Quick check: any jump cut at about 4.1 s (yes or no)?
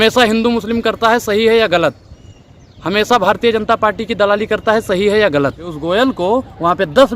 no